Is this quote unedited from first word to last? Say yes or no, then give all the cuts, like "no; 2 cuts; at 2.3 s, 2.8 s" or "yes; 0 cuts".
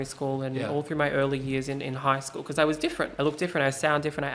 no; 1 cut; at 3.1 s